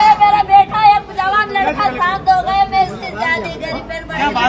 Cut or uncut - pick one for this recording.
uncut